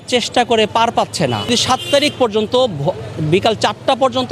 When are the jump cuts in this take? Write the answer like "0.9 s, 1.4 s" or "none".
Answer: 1.5 s